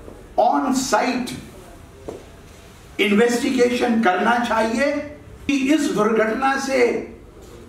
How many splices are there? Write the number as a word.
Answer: one